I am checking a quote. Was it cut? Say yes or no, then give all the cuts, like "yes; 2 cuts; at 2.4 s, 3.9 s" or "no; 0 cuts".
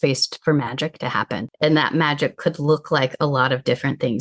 yes; 1 cut; at 1.6 s